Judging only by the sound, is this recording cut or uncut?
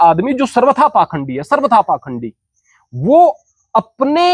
uncut